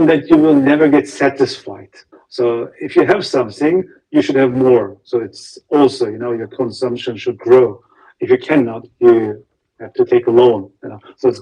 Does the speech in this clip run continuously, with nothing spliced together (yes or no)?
yes